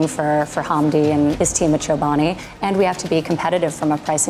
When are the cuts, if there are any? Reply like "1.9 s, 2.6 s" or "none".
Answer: 1.4 s

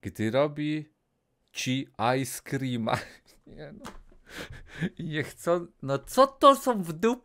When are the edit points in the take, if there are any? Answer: none

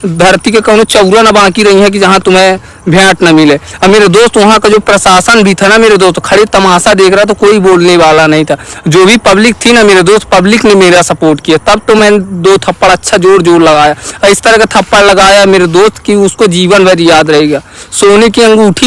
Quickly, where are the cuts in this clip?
none

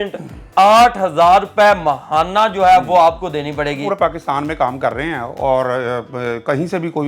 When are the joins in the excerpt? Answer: 3.8 s

